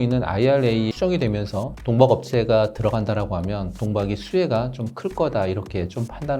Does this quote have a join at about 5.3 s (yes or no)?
no